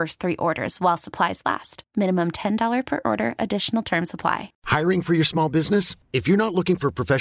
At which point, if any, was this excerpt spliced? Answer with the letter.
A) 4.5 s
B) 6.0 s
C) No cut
A